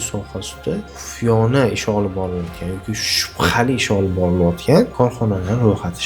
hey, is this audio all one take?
no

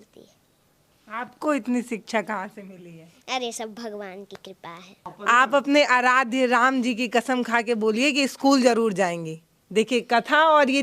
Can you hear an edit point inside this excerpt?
yes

